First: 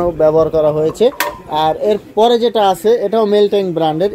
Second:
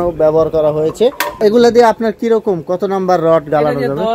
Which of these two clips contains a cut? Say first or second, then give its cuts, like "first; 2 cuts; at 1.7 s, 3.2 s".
second; 1 cut; at 1.4 s